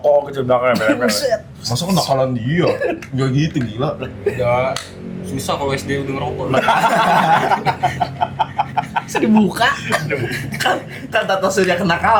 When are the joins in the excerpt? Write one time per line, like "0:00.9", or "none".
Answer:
none